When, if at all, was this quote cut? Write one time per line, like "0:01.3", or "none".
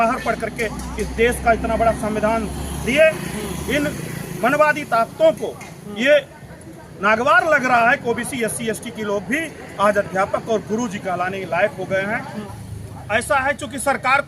0:12.4